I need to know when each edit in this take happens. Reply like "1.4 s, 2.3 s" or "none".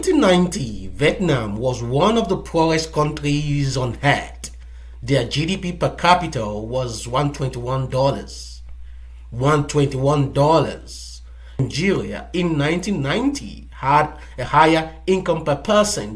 11.6 s